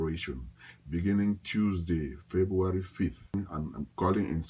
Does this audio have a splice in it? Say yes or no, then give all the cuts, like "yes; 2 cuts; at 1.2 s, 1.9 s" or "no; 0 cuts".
yes; 1 cut; at 3.3 s